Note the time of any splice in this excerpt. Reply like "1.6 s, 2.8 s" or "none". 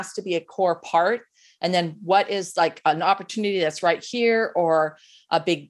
none